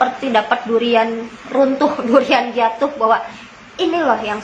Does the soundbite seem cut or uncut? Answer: uncut